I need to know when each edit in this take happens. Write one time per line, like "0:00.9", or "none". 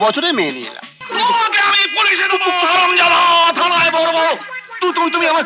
0:01.0